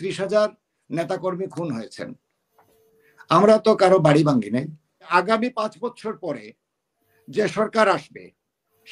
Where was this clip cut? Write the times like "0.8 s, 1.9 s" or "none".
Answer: 5.1 s